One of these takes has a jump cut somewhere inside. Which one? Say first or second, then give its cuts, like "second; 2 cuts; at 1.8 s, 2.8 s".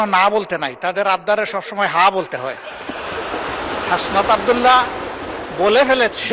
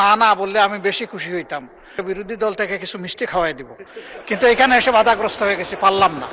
second; 1 cut; at 2.0 s